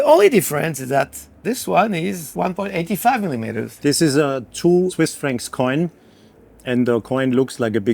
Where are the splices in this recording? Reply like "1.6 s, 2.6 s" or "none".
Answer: 1.4 s, 3.7 s